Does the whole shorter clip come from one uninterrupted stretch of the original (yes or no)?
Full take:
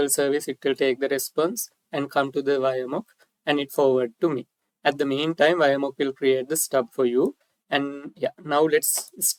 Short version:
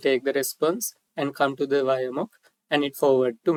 yes